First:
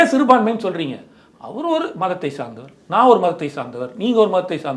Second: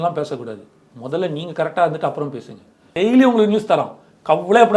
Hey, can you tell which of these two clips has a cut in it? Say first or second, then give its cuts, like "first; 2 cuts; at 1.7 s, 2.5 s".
second; 1 cut; at 2.9 s